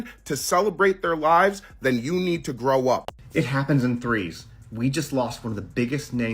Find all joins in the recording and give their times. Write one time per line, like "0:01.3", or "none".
0:03.0